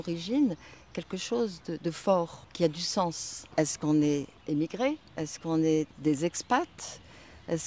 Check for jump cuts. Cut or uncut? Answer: cut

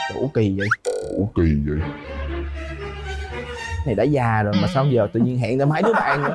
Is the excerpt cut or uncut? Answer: uncut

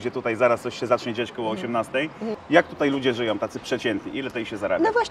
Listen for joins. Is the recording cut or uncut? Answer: cut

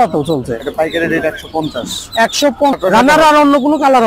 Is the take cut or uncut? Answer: cut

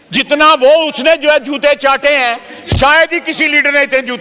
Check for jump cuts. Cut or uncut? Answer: uncut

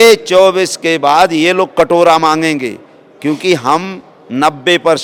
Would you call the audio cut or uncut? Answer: uncut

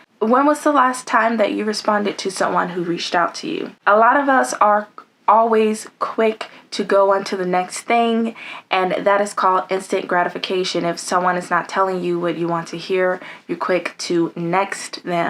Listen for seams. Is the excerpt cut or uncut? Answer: uncut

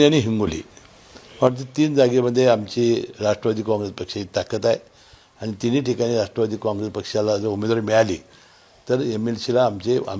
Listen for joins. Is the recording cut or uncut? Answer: uncut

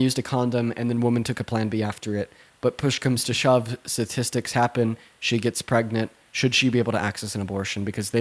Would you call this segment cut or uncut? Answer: uncut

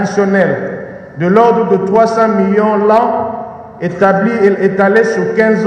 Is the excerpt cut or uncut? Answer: uncut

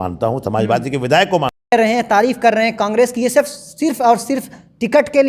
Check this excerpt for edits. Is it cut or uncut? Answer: cut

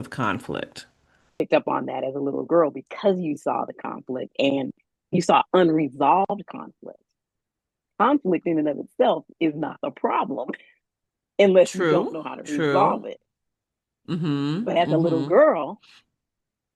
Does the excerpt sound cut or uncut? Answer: cut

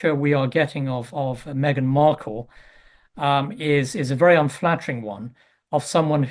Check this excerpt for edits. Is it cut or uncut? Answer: uncut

